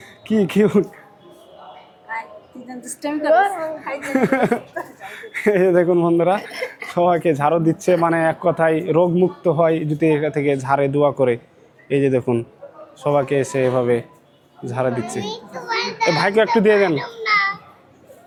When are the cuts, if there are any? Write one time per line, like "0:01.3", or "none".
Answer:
none